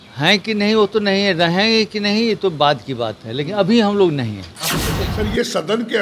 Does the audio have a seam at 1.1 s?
no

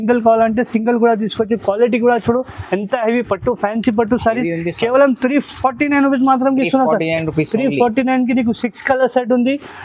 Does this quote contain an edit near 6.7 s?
no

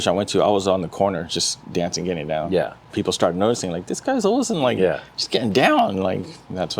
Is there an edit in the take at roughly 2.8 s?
yes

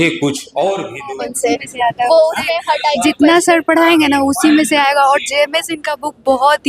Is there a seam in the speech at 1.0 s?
yes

